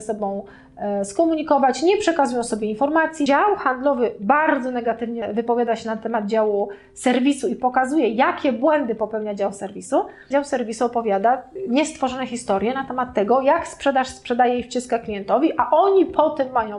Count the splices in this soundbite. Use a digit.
4